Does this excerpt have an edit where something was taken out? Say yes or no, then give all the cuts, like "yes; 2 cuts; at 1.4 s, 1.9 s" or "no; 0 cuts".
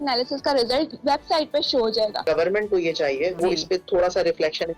yes; 3 cuts; at 0.9 s, 2.2 s, 3.4 s